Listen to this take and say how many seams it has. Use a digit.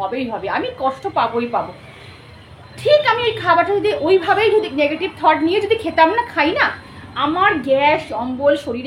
0